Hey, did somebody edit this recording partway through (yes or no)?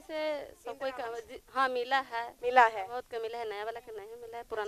no